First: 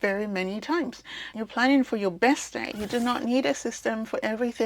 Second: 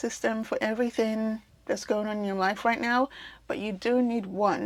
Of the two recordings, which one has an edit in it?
first; 1 cut; at 2.7 s

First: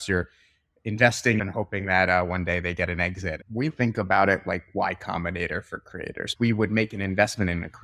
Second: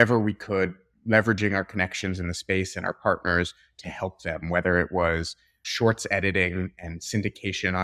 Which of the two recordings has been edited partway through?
first; 3 cuts; at 1.4 s, 3.7 s, 6.3 s

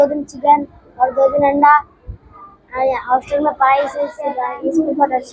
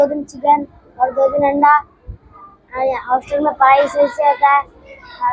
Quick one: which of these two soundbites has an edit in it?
first; 1 cut; at 4.1 s

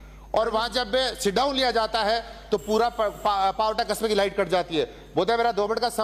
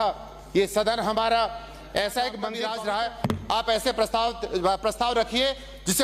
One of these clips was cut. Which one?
second; 1 cut; at 2.6 s

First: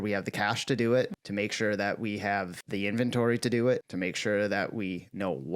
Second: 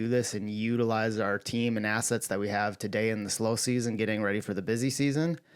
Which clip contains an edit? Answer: first; 3 cuts; at 1.2 s, 2.6 s, 3.9 s

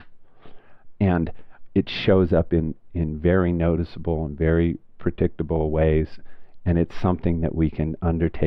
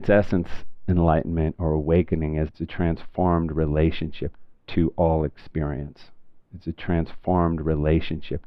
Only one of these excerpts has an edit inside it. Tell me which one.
second; 2 cuts; at 2.5 s, 4.3 s

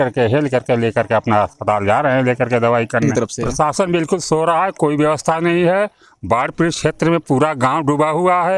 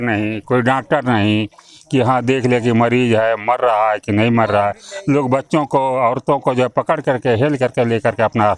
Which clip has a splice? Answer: first; 1 cut; at 3.3 s

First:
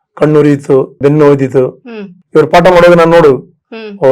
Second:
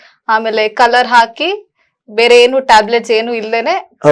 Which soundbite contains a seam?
first; 2 cuts; at 1.0 s, 2.2 s

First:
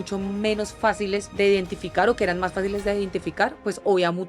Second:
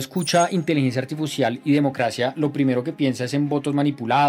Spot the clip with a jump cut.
first; 1 cut; at 1.3 s

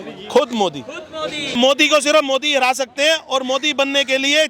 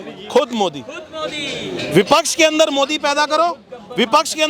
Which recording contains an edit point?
first; 1 cut; at 1.6 s

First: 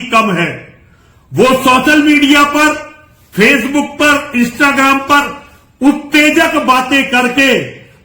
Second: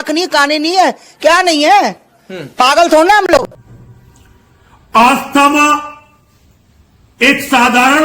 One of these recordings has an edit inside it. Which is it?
second; 1 cut; at 3.2 s

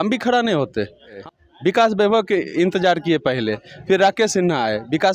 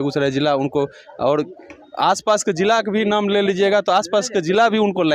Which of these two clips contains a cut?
first; 1 cut; at 1.2 s

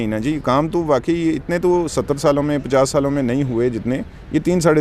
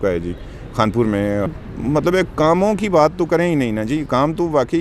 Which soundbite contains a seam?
second; 1 cut; at 1.5 s

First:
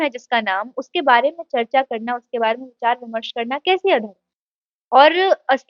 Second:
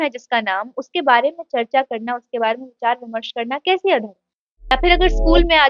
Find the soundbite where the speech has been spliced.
second; 1 cut; at 4.7 s

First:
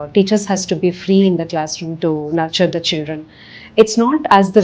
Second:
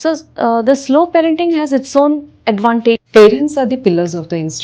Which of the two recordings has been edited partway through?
second; 1 cut; at 3.0 s

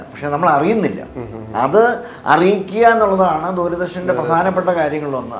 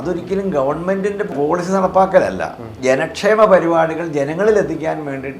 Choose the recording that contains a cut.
second; 2 cuts; at 1.3 s, 2.7 s

